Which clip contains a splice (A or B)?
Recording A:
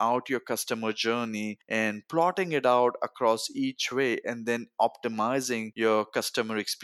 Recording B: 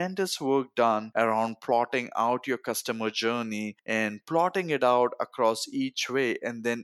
A